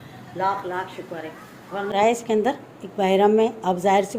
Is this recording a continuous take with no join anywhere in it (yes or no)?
no